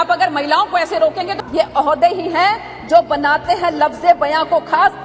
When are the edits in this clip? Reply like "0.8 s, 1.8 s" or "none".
1.4 s